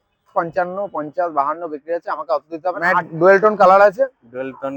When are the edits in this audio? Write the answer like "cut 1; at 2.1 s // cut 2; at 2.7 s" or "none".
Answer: cut 1; at 3.1 s